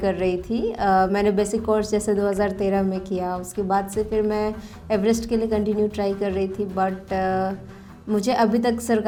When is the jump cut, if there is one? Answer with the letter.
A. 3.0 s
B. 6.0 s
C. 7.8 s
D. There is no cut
D